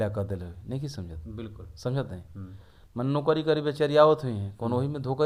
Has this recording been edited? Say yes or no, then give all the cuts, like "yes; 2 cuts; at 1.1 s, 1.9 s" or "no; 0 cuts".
no; 0 cuts